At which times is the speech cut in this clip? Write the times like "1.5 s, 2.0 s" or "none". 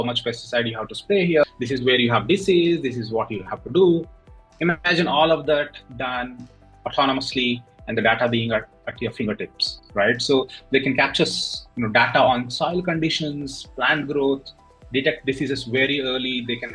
none